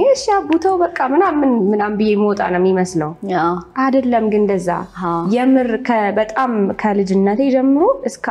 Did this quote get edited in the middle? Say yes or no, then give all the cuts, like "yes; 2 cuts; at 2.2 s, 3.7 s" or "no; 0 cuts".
no; 0 cuts